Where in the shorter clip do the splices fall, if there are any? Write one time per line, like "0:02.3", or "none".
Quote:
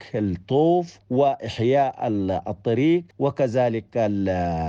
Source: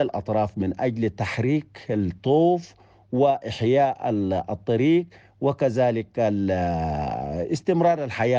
0:01.0
0:03.1